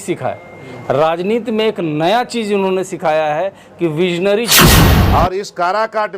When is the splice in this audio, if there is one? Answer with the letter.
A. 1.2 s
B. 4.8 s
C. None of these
B